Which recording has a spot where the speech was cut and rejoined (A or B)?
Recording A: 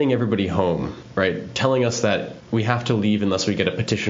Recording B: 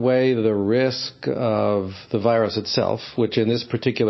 A